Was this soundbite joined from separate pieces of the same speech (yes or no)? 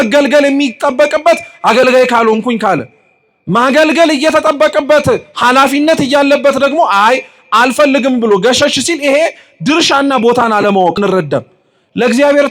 yes